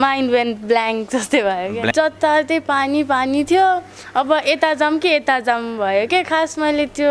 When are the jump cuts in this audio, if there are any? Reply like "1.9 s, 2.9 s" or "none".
1.9 s